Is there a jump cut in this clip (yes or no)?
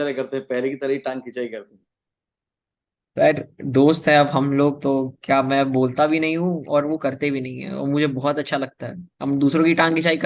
no